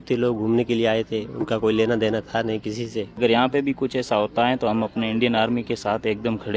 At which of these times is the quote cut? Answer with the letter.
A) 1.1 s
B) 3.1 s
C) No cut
B